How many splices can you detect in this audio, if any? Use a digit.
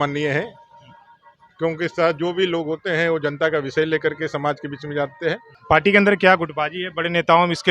1